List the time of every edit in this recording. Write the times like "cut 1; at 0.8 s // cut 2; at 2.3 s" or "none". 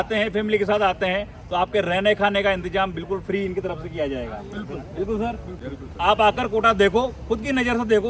none

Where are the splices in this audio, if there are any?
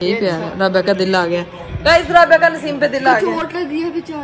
none

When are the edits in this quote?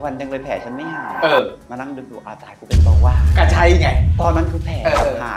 none

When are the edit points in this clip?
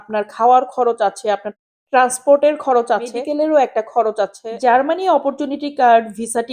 cut 1; at 3.2 s // cut 2; at 4.4 s

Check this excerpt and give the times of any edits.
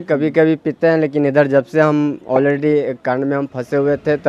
none

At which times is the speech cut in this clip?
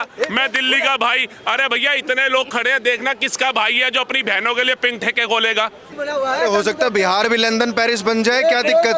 cut 1; at 5.9 s

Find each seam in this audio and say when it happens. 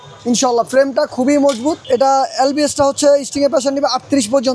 cut 1; at 1.8 s

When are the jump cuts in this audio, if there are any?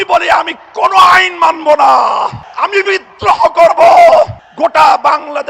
cut 1; at 2.4 s // cut 2; at 4.4 s

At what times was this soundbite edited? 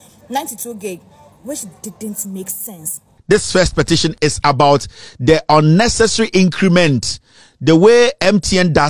cut 1; at 3.1 s

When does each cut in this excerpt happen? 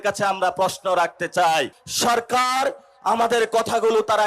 cut 1; at 1.8 s

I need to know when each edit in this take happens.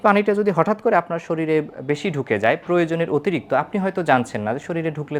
none

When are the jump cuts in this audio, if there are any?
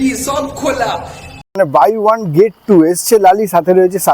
cut 1; at 1.6 s

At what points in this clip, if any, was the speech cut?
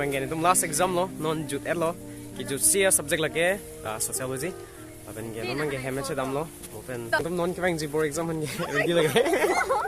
cut 1; at 7.2 s

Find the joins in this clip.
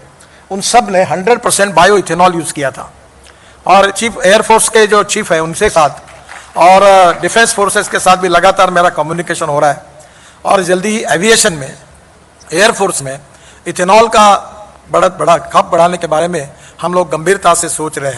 none

